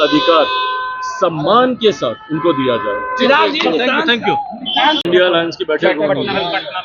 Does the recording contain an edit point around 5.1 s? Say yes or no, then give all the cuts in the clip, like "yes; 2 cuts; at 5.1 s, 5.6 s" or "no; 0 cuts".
yes; 1 cut; at 5.1 s